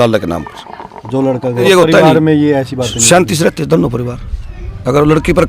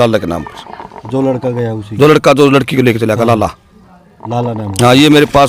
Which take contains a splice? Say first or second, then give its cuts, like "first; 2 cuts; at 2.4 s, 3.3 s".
first; 1 cut; at 1.6 s